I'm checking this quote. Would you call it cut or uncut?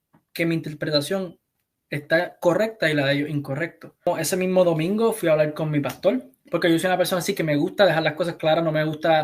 cut